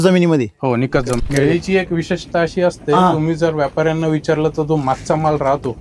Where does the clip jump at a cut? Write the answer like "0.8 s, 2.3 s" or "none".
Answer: 1.2 s